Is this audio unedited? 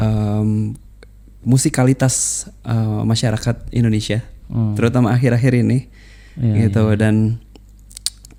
yes; 0 cuts

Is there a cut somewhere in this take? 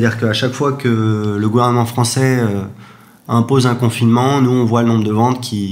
no; 0 cuts

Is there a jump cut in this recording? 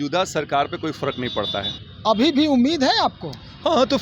yes; 1 cut; at 1.8 s

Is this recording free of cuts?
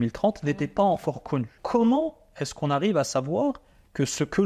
no; 1 cut; at 1.6 s

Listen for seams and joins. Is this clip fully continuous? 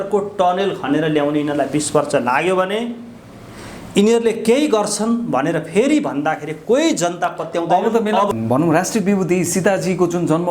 no; 1 cut; at 8.3 s

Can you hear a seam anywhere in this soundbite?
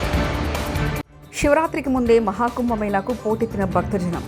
yes; 1 cut; at 1.1 s

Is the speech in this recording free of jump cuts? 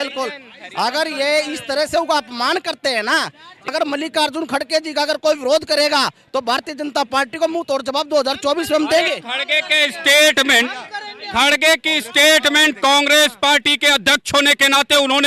no; 1 cut; at 3.7 s

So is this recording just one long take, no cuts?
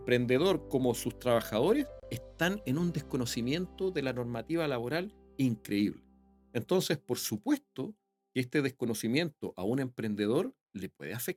yes; 0 cuts

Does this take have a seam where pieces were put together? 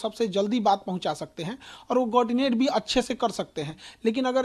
no; 0 cuts

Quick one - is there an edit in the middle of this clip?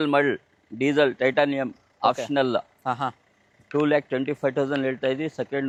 no; 0 cuts

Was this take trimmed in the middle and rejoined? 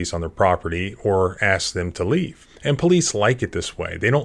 yes; 1 cut; at 2.4 s

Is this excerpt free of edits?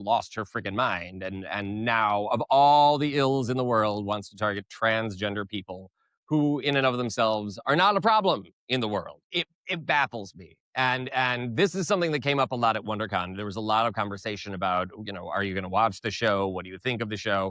yes; 0 cuts

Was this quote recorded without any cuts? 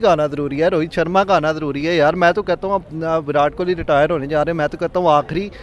yes; 0 cuts

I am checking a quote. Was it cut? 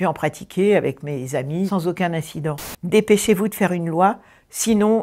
yes; 1 cut; at 2.6 s

